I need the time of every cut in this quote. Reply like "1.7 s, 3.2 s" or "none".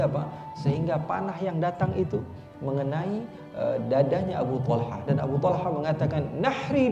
none